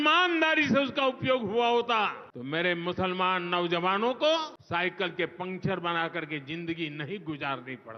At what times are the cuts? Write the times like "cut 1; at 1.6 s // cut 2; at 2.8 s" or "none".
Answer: cut 1; at 2.3 s // cut 2; at 4.6 s